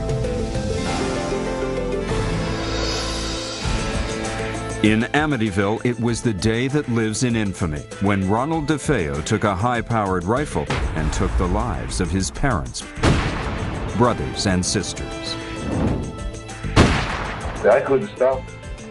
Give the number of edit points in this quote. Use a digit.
1